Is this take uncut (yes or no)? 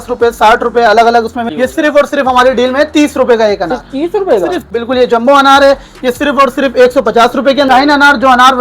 no